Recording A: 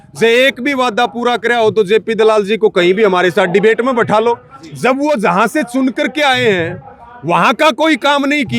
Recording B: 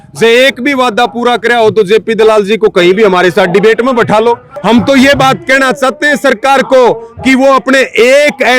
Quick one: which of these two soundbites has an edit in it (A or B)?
B